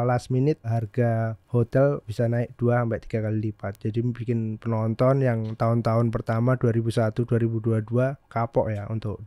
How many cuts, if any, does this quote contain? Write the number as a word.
two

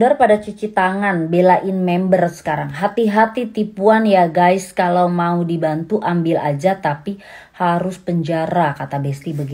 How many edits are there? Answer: zero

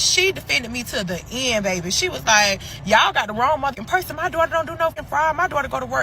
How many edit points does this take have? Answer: two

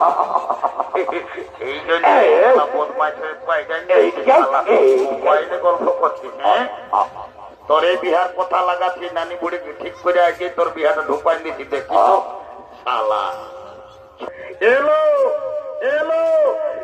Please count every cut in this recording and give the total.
one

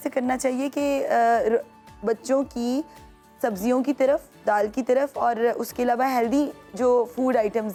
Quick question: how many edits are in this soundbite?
zero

